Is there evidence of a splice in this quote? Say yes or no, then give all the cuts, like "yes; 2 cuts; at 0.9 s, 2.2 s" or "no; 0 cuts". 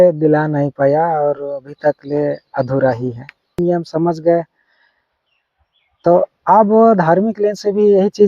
yes; 1 cut; at 3.6 s